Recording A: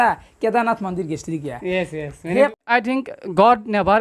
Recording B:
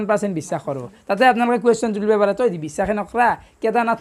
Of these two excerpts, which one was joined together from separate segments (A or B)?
A